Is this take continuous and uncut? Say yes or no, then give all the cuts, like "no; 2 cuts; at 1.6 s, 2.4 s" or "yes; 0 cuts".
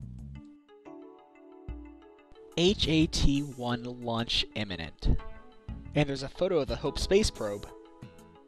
yes; 0 cuts